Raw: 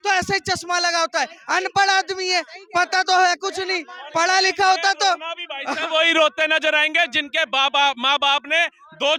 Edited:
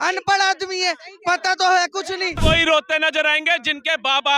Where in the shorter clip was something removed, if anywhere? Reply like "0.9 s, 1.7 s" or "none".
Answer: 2.3 s